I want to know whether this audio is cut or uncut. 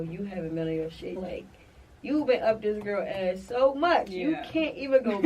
cut